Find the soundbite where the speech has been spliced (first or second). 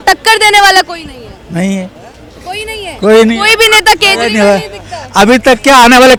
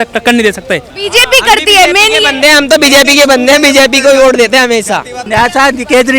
second